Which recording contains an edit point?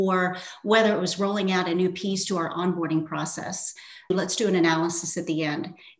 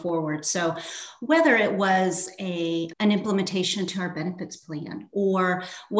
first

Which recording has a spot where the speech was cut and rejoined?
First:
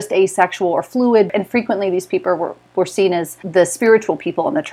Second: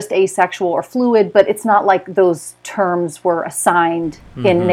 first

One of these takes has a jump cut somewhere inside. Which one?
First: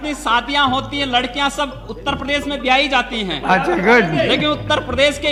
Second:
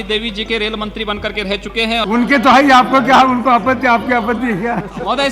second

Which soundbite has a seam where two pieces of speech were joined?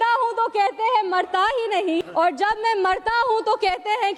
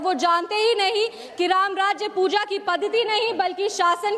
first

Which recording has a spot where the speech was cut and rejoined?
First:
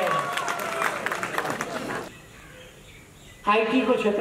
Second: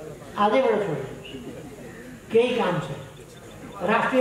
first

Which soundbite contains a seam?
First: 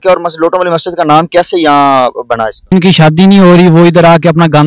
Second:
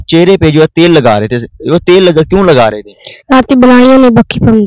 first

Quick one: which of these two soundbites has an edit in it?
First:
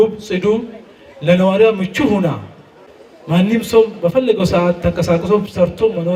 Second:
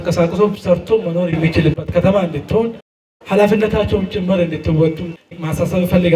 second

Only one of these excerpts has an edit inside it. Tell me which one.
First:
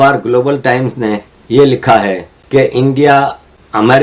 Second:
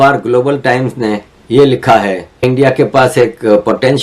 second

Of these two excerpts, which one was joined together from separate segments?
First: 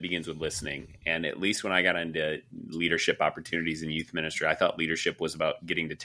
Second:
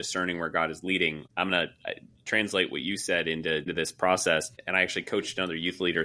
second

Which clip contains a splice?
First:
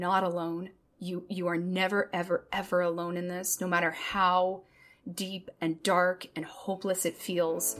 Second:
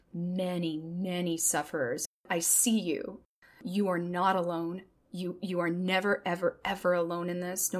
second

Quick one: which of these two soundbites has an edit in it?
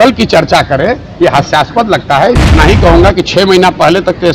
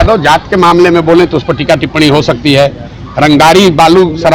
first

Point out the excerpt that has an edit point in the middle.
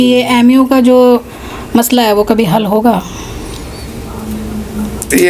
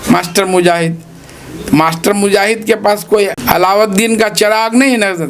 second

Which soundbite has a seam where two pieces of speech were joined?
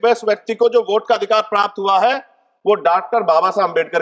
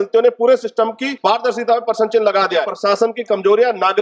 second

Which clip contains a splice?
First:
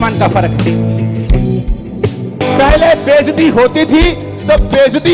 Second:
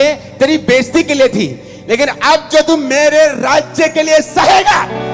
first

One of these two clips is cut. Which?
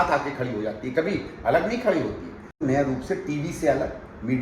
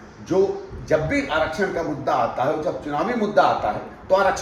first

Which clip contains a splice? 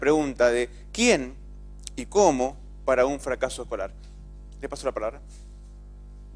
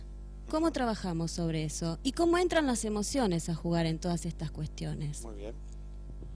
first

